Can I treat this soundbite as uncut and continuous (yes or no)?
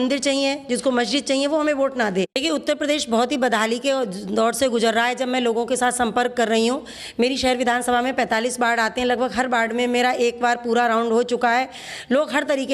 no